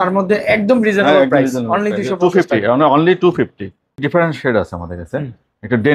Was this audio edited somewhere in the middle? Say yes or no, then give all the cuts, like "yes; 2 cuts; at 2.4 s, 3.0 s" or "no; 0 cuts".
yes; 1 cut; at 4.0 s